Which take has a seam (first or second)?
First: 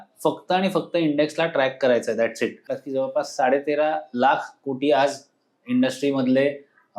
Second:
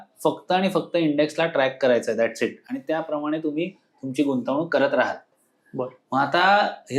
first